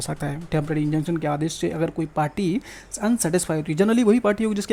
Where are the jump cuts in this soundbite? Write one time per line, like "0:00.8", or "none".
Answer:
none